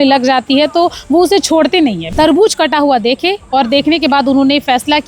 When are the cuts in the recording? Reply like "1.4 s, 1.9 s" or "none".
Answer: 2.0 s